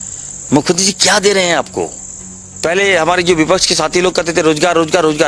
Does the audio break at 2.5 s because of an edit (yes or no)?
yes